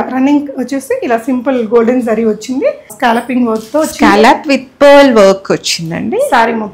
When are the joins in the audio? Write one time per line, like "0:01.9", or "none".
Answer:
0:02.9